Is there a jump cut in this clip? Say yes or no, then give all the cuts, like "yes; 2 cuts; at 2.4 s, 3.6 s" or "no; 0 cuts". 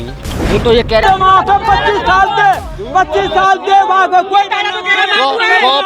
yes; 1 cut; at 1.0 s